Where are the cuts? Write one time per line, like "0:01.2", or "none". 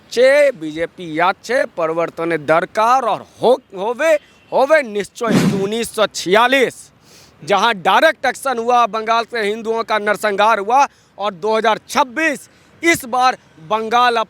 0:05.5